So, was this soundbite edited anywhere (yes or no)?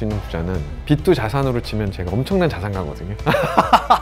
no